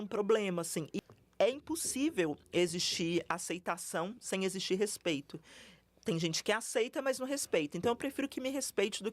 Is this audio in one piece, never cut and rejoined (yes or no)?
no